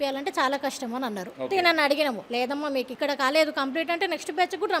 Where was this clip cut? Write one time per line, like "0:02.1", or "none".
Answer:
0:01.3
0:02.5